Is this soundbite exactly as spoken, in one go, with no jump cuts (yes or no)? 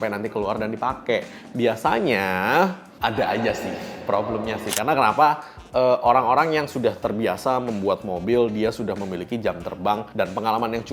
yes